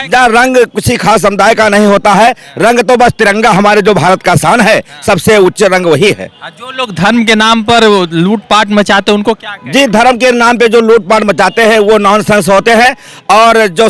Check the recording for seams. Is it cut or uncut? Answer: uncut